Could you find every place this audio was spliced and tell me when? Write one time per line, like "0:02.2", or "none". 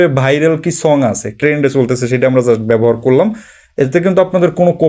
0:01.4